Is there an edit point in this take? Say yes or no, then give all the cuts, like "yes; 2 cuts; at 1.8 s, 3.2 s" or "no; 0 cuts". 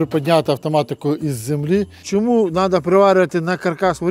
yes; 1 cut; at 2.0 s